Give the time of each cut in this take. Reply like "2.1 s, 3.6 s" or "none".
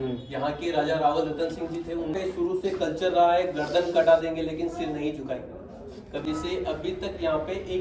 2.1 s, 6.2 s